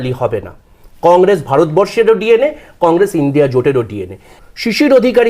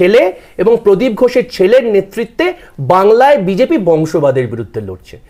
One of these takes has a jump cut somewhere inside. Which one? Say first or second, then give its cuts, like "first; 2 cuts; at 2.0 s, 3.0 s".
first; 1 cut; at 4.3 s